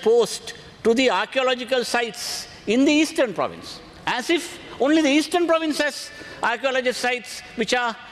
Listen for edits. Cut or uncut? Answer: uncut